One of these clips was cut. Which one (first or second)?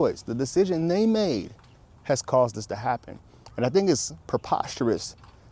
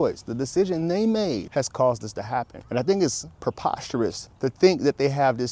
second